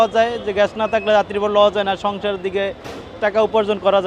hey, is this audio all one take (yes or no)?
yes